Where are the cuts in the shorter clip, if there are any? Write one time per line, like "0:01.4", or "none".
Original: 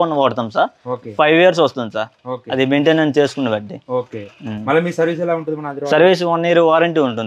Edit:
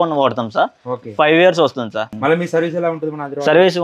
0:02.1

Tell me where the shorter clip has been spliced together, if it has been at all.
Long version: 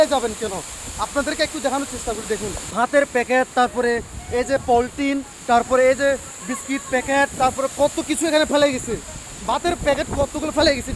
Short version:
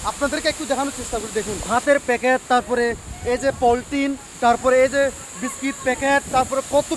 0:01.6

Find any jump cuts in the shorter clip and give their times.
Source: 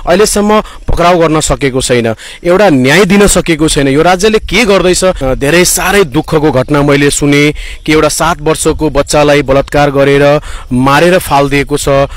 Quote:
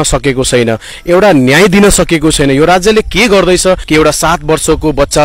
0:03.8

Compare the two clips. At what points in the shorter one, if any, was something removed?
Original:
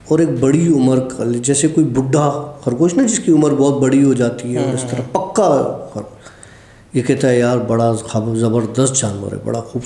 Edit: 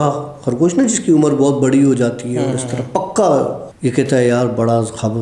0:03.7

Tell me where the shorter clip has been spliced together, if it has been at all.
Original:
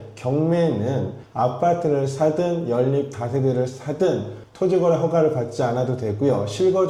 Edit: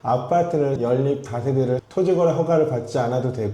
0:00.8
0:01.9

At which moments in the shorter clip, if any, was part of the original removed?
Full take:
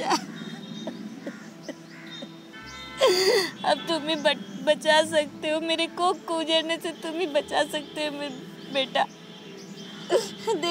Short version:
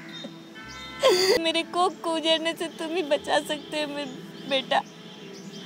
0:01.4

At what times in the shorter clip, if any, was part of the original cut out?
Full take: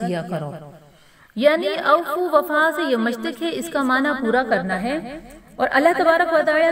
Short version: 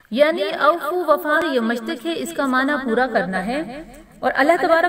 0:01.4

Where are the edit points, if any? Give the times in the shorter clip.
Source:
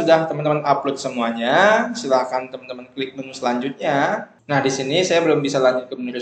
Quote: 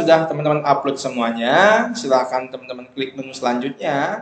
none

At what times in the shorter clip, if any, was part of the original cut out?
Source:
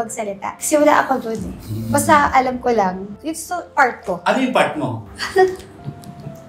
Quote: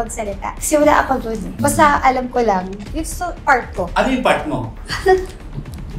0:01.4

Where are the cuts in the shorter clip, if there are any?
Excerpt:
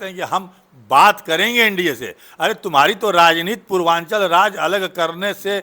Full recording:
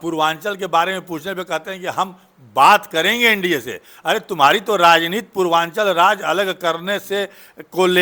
none

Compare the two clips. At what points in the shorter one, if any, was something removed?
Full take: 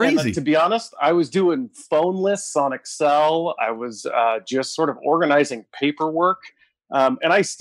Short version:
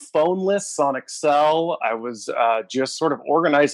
none

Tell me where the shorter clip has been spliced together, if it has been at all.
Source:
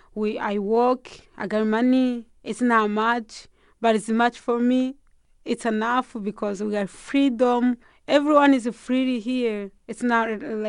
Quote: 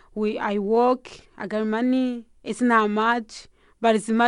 none

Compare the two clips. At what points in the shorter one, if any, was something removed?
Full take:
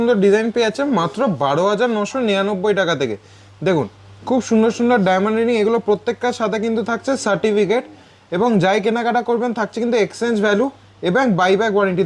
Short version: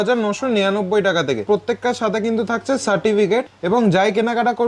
0:01.4
0:03.5

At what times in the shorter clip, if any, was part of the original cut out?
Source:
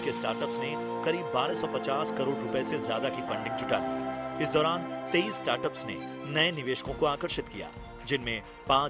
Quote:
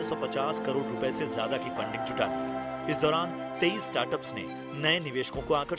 none

